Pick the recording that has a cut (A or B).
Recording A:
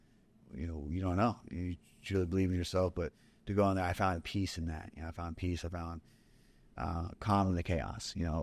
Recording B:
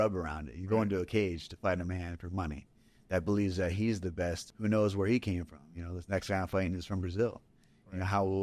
B